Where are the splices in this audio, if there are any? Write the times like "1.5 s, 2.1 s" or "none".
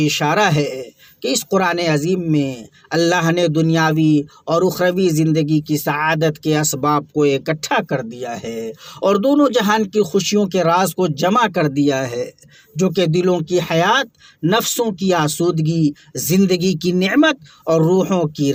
none

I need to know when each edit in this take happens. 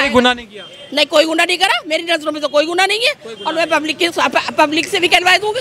none

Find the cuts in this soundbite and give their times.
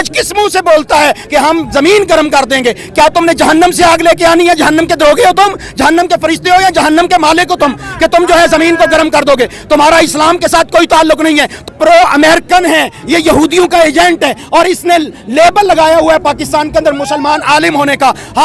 1.2 s, 11.7 s

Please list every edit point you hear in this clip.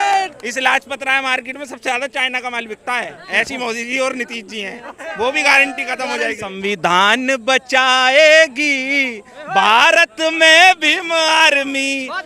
6.6 s

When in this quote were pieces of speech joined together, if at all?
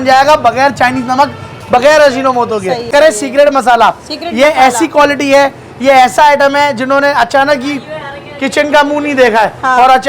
2.9 s

